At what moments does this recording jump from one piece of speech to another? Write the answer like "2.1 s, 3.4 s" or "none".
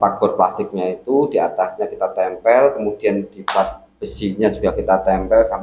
none